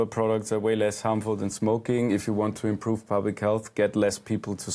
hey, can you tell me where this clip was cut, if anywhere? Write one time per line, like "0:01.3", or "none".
none